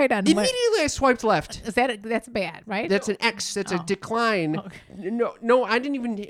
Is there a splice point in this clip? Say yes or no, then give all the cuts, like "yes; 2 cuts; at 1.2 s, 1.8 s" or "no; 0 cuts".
yes; 1 cut; at 2.8 s